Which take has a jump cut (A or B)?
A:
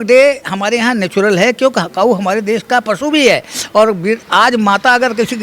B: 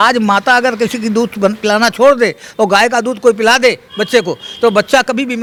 A